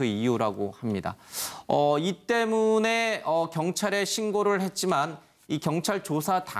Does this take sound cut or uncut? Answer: cut